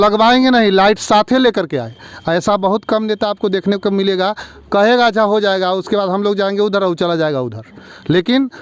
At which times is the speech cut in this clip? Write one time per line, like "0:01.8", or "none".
none